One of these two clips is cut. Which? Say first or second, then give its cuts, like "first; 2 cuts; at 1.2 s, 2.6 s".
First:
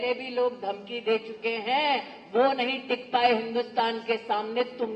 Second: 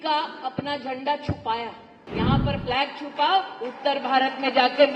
second; 1 cut; at 2.0 s